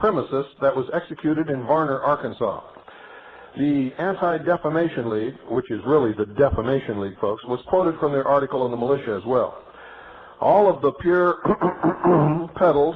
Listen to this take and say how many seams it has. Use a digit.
1